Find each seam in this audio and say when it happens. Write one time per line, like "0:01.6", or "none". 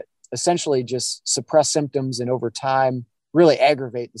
0:03.1

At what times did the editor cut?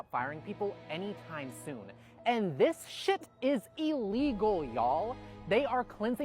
none

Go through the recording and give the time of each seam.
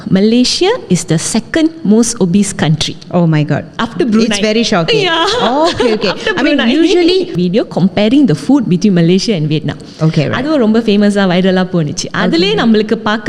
0:07.3

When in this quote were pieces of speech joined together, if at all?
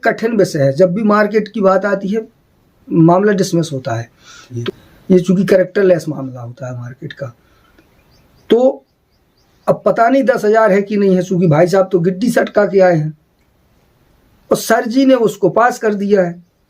0:04.5

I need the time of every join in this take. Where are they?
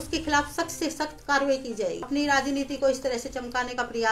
0:02.0

